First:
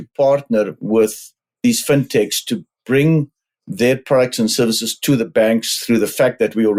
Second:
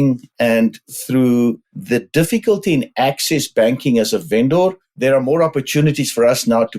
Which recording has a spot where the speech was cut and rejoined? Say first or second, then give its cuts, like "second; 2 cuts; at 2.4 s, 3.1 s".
second; 3 cuts; at 0.9 s, 1.7 s, 4.9 s